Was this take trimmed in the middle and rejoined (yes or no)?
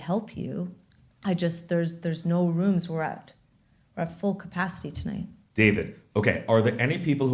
no